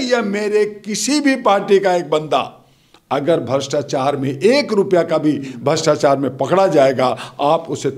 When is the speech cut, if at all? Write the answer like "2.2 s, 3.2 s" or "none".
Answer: none